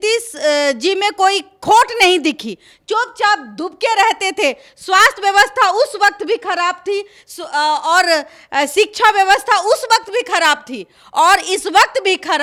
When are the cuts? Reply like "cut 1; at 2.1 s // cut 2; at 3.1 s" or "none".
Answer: none